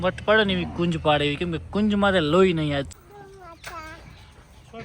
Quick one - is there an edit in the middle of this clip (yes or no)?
yes